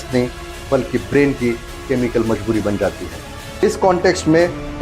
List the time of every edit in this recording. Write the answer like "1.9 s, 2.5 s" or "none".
3.6 s